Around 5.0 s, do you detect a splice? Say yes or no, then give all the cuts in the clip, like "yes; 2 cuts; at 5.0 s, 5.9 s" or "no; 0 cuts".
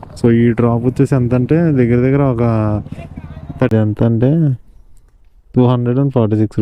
no; 1 cut; at 3.7 s